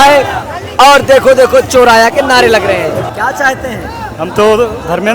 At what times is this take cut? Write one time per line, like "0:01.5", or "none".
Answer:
0:03.0